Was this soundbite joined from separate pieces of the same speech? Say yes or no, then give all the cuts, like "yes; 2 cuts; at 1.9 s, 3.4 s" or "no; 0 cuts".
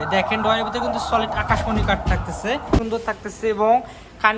yes; 1 cut; at 2.8 s